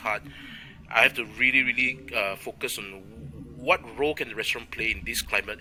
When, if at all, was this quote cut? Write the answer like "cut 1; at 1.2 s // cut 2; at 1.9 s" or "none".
none